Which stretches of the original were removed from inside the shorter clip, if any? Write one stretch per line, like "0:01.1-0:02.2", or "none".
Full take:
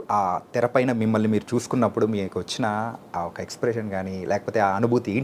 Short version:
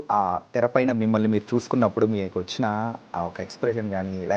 none